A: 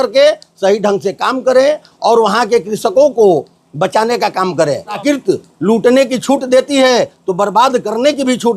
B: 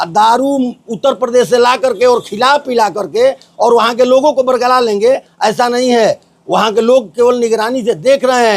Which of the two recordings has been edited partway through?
A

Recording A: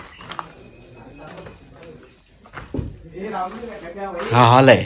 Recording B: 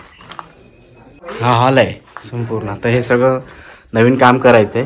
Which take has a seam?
B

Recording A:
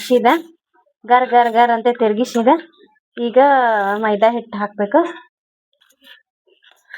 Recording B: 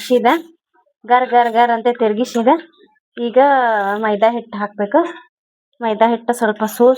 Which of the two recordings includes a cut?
A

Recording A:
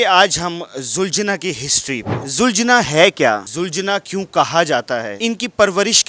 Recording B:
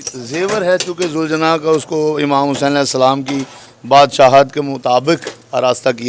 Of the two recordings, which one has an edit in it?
A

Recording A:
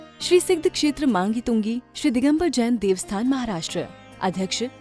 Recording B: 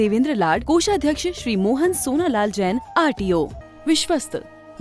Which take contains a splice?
B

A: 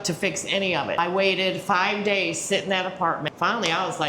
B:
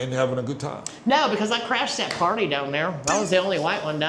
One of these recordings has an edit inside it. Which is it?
A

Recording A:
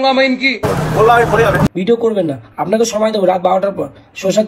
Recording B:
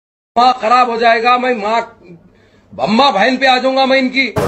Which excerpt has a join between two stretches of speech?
A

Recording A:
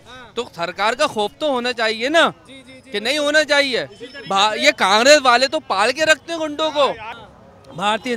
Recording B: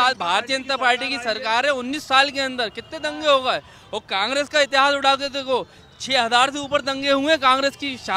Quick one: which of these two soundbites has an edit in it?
A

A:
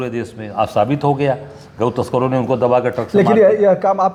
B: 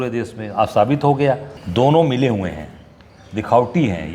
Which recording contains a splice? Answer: B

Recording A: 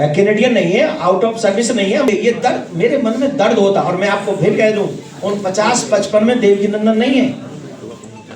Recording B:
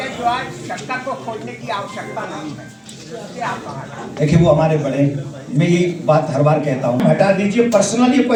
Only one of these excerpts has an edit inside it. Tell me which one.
A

